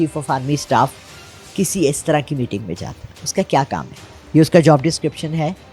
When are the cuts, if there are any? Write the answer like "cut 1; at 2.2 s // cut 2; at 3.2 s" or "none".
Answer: none

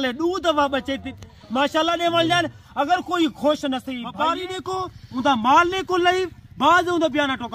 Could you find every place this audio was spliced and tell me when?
cut 1; at 4.0 s

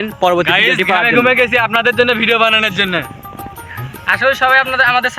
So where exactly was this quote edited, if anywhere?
none

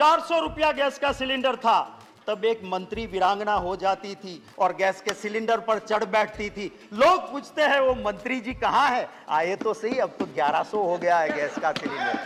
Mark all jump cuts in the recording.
none

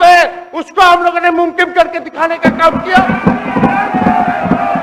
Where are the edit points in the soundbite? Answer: none

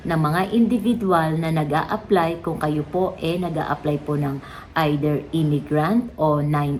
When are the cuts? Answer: none

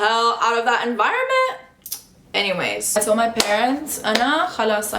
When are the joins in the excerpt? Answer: cut 1; at 2.9 s

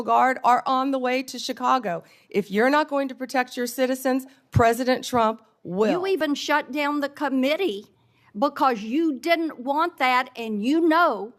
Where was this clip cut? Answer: cut 1; at 6.2 s

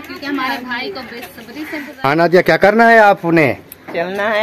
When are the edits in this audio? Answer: cut 1; at 1.9 s

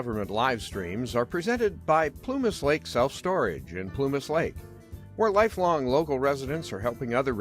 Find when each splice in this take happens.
cut 1; at 2.0 s

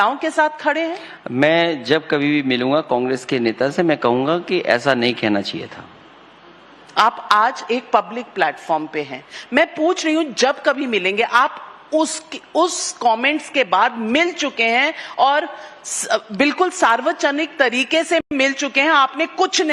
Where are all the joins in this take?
none

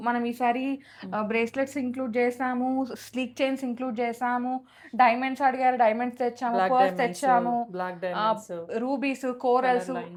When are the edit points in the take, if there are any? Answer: none

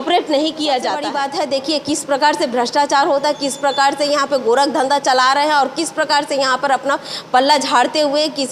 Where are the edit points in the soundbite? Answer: cut 1; at 1.1 s

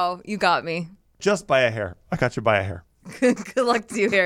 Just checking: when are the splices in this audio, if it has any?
cut 1; at 1.2 s

